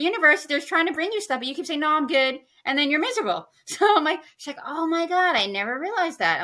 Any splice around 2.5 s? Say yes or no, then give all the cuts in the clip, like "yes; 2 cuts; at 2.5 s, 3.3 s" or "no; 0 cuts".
no; 0 cuts